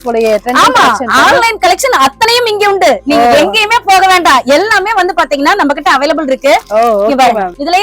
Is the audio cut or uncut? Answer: uncut